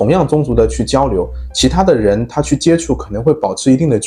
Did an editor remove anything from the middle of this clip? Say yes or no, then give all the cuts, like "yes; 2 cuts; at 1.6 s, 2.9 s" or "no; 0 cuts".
no; 0 cuts